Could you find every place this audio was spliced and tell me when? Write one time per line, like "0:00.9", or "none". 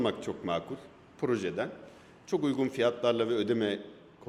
none